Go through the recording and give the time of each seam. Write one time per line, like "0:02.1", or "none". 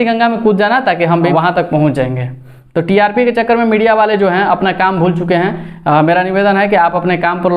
0:01.3